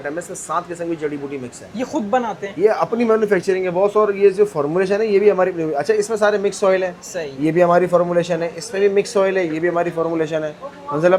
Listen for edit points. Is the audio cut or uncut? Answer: uncut